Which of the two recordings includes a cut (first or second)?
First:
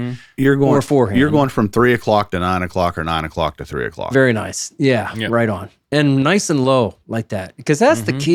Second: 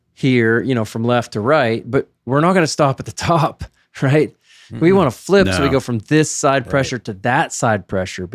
second